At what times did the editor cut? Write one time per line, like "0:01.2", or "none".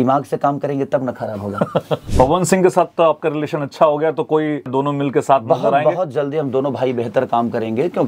0:02.0
0:04.7